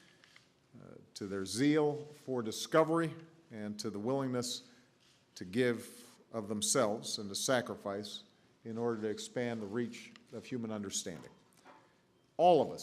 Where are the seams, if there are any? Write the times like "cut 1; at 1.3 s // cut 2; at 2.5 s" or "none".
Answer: cut 1; at 8.9 s